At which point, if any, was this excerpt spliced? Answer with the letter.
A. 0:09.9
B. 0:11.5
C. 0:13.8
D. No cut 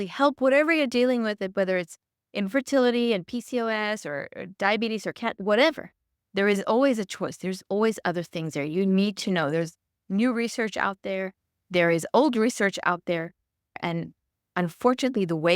C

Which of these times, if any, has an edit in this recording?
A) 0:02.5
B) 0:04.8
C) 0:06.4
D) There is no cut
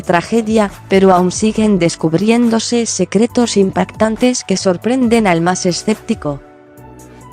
B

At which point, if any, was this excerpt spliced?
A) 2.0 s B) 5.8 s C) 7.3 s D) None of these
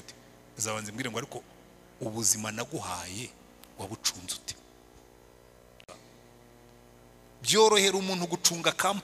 B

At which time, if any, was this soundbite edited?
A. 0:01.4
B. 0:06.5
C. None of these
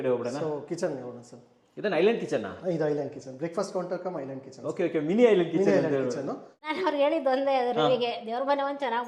B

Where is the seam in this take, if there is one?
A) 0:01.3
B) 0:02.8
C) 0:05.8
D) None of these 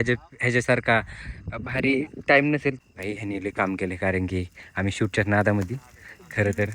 B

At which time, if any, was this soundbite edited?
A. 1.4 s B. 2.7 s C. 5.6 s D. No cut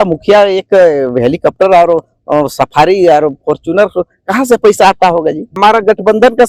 C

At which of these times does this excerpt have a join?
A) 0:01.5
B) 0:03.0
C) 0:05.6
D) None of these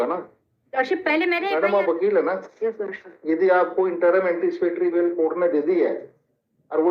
A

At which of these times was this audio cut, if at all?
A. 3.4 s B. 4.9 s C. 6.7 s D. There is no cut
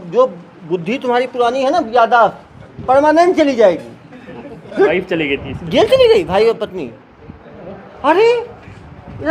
B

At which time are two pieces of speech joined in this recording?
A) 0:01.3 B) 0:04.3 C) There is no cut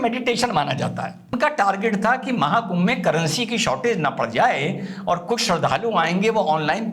A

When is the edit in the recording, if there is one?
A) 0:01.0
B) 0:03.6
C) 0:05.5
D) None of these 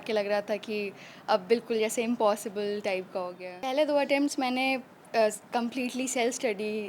B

